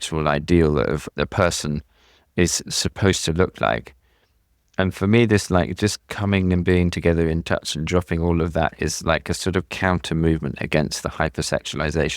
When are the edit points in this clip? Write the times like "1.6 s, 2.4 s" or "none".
1.0 s